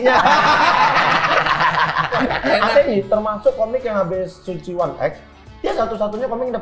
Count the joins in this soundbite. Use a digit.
1